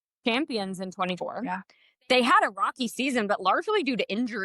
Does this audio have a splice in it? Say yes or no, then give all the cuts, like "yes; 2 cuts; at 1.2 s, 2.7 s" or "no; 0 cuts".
yes; 1 cut; at 1.2 s